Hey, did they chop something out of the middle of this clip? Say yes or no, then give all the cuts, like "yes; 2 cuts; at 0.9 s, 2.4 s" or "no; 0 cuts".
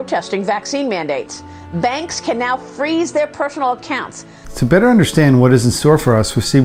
no; 0 cuts